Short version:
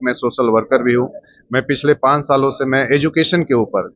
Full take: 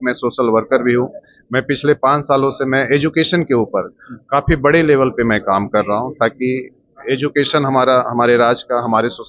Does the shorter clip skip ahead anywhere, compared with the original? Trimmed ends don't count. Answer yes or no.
no